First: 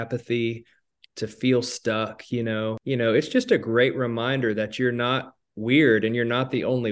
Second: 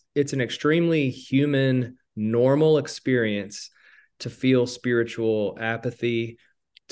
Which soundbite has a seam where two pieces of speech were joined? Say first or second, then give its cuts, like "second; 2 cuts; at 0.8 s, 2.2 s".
first; 1 cut; at 2.8 s